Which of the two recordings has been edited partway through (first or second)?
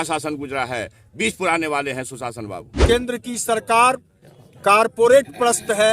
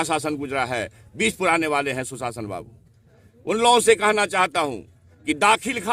first